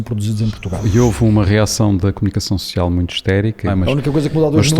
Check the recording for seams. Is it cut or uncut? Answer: cut